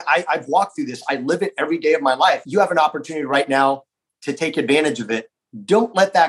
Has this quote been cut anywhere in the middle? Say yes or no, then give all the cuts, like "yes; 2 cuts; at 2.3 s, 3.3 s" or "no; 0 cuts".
yes; 1 cut; at 2.4 s